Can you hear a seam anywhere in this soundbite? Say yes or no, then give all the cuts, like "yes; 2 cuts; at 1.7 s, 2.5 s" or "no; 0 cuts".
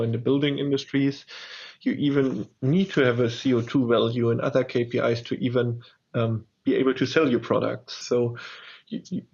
yes; 1 cut; at 7.9 s